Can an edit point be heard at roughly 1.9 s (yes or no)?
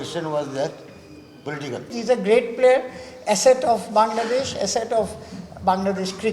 yes